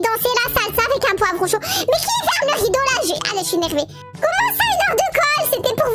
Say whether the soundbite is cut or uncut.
uncut